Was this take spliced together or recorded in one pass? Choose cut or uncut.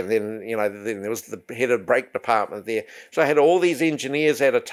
uncut